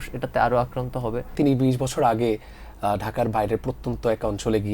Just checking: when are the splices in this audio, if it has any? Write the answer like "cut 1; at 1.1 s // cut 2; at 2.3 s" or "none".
cut 1; at 1.3 s